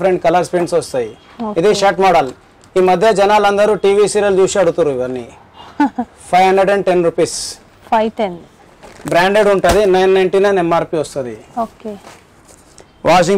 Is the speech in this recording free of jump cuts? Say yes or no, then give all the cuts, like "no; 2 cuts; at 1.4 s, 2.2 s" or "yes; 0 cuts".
yes; 0 cuts